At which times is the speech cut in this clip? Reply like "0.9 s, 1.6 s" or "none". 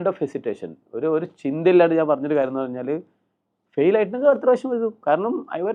none